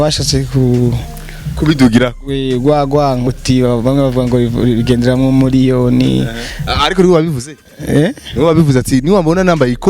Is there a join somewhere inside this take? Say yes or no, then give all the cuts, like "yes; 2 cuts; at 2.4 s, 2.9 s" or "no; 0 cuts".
yes; 1 cut; at 3.3 s